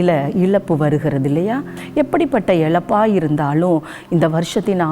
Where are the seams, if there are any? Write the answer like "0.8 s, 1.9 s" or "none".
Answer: 1.7 s